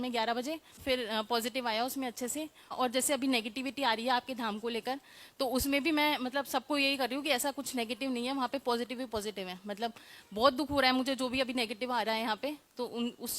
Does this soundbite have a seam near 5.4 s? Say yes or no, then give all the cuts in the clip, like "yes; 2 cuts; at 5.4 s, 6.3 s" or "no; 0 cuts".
no; 2 cuts; at 0.8 s, 2.7 s